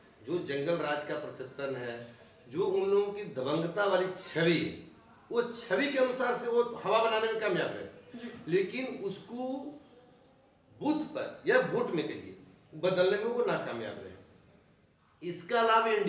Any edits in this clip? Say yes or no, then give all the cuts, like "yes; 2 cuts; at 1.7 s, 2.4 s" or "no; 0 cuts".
no; 0 cuts